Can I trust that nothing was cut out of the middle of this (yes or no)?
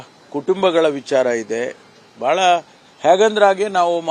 yes